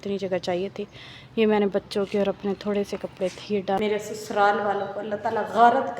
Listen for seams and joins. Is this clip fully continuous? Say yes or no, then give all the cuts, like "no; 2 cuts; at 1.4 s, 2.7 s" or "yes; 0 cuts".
no; 1 cut; at 3.8 s